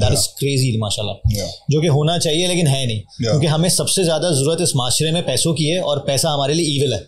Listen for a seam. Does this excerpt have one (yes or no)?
no